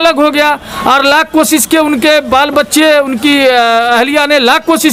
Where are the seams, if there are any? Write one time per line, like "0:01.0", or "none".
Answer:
none